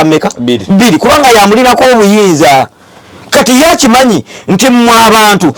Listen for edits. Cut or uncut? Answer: uncut